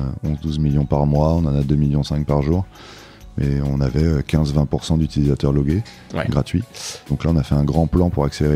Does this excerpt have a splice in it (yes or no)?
yes